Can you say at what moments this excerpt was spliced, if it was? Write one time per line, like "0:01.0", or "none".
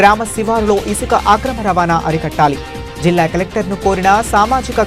none